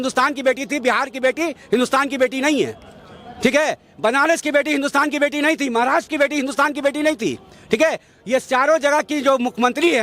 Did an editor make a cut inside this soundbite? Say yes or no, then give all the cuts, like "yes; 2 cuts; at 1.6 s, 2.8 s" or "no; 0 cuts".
no; 0 cuts